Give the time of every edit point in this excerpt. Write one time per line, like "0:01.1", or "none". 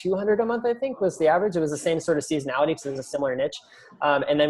none

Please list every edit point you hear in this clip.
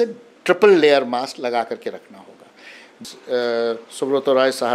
0:03.0

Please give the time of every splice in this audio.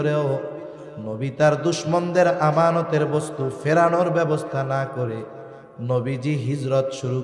none

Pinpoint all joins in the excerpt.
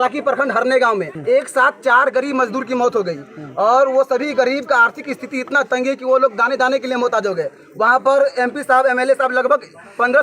0:01.1

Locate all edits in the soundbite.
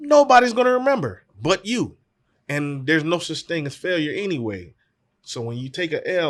none

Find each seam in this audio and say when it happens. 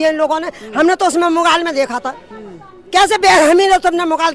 none

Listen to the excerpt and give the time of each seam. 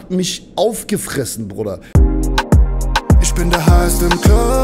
0:01.8

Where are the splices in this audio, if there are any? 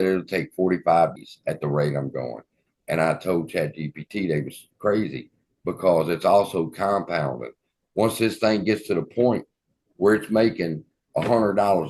0:01.1

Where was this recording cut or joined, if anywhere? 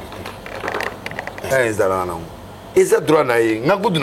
0:01.5

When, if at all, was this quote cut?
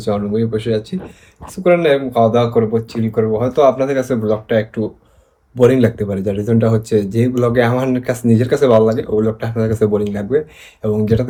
none

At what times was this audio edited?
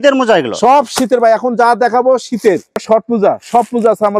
0:02.7

